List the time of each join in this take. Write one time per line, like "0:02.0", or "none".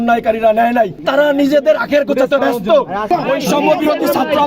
0:01.0
0:03.0